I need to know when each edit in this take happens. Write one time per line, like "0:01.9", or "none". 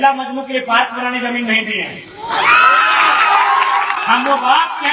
0:04.0